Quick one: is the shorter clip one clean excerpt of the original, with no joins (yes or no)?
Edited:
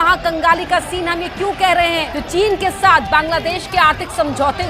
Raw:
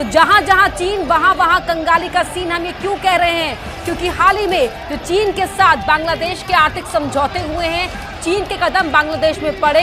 no